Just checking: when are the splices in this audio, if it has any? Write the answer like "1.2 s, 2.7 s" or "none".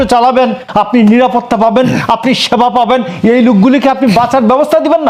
none